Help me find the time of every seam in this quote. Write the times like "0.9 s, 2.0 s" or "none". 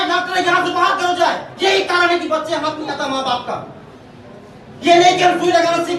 none